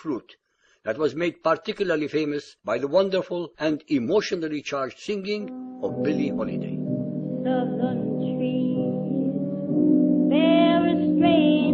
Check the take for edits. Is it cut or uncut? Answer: uncut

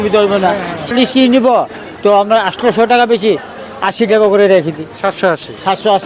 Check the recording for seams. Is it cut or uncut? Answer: cut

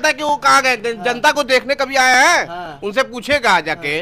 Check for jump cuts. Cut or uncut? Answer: uncut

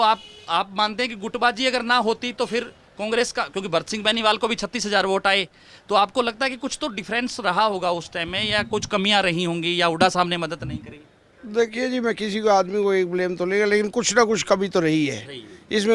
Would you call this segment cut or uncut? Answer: uncut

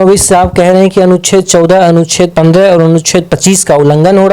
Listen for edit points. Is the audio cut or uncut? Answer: uncut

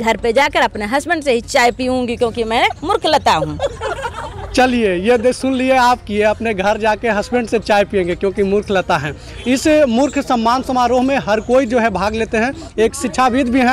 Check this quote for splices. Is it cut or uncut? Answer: uncut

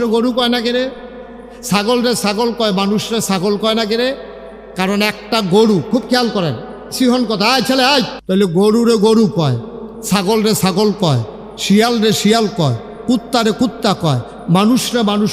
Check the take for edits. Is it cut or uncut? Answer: cut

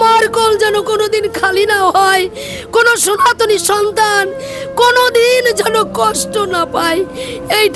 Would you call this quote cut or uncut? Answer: uncut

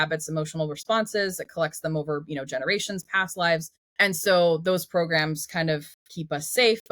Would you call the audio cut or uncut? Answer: cut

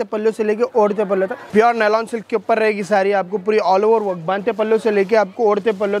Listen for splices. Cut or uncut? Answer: cut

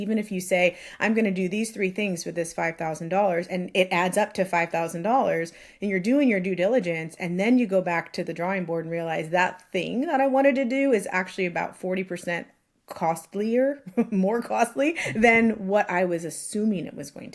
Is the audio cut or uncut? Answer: uncut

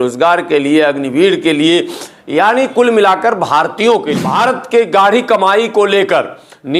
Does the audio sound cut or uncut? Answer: cut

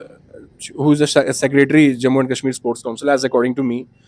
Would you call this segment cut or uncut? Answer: uncut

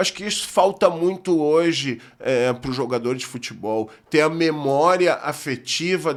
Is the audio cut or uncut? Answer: uncut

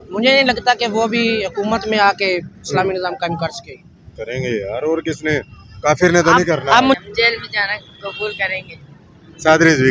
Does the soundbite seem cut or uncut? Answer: cut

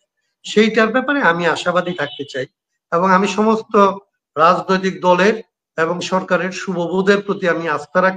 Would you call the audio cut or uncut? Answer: uncut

